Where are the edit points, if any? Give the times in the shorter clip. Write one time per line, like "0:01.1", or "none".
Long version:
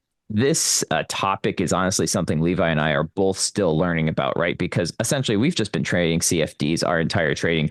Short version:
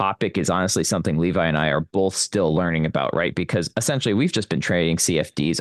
none